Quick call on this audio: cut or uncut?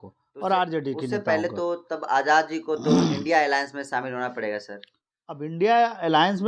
uncut